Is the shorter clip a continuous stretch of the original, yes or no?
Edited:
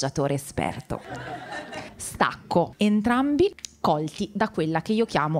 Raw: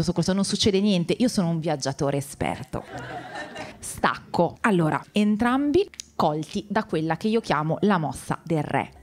no